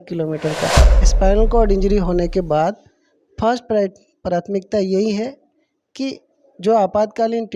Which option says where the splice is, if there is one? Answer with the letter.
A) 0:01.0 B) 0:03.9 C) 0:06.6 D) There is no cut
A